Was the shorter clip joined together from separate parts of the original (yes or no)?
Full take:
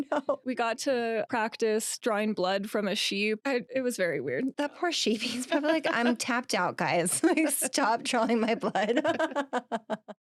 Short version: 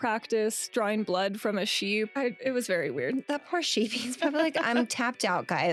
no